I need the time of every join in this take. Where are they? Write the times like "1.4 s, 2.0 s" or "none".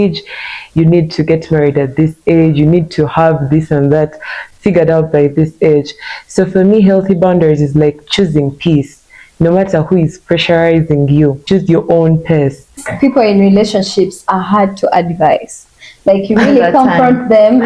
11.4 s, 12.8 s

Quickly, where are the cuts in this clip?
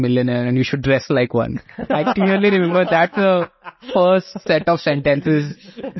none

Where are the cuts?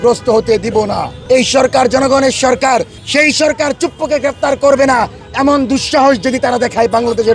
1.1 s, 3.0 s

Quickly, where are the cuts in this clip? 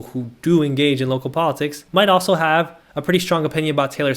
1.7 s

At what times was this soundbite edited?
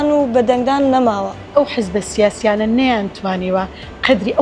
1.4 s

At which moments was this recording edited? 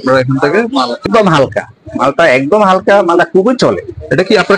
1.0 s

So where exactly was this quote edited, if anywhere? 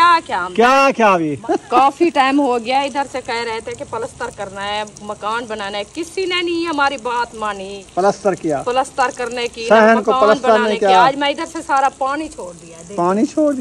1.4 s, 7.8 s

